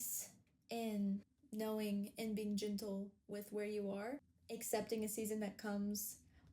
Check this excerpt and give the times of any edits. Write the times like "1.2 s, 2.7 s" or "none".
1.4 s, 4.3 s